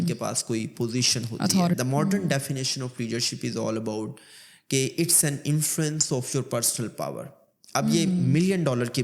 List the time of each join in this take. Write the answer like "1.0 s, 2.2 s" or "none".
1.8 s